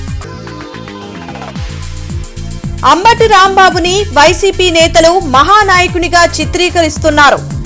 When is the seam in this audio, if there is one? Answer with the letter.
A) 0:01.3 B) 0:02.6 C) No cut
B